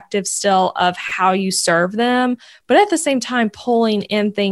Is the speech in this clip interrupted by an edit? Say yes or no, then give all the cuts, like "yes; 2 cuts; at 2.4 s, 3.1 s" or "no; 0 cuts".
no; 0 cuts